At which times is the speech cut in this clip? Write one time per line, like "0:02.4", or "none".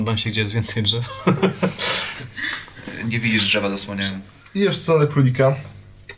0:04.3